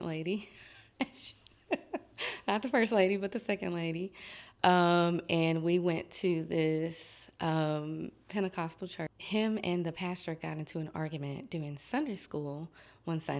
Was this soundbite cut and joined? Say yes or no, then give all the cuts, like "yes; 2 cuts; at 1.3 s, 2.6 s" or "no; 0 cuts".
yes; 1 cut; at 9.1 s